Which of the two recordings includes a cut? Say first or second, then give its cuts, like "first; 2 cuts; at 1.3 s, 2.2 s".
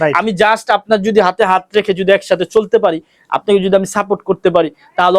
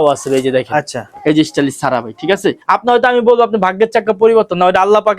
second; 1 cut; at 2.6 s